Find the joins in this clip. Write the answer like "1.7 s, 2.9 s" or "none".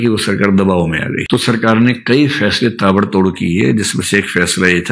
1.2 s